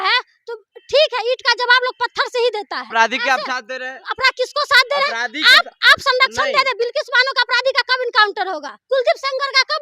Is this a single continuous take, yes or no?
no